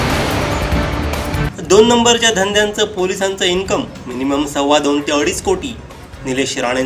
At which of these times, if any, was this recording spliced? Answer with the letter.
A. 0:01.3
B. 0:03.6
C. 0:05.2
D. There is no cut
A